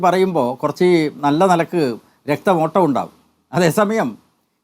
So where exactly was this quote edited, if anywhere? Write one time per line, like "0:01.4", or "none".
none